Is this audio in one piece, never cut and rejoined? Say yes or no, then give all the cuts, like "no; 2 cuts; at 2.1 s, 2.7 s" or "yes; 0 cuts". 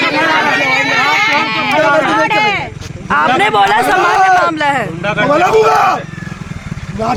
yes; 0 cuts